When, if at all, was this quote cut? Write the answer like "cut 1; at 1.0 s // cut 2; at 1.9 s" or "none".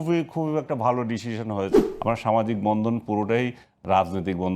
cut 1; at 1.8 s

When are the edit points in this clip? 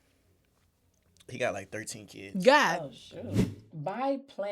cut 1; at 3.5 s

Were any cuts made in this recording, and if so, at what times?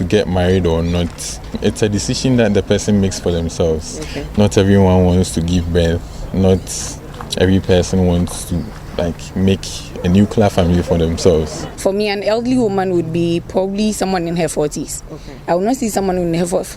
cut 1; at 1.5 s // cut 2; at 11.7 s

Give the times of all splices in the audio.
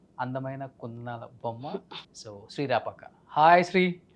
cut 1; at 2.0 s

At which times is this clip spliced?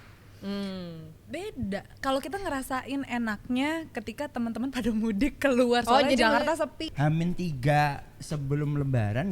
cut 1; at 6.9 s

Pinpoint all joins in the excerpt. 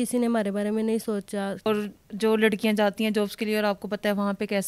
cut 1; at 1.6 s

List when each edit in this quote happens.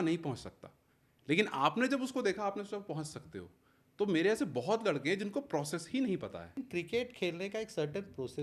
cut 1; at 6.5 s

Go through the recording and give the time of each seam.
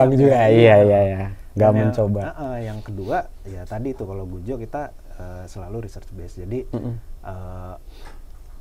none

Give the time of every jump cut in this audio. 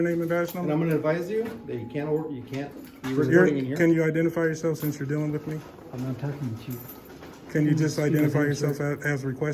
none

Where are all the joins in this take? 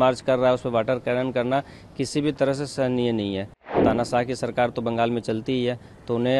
cut 1; at 3.8 s

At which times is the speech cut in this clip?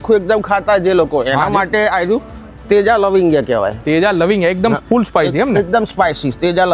none

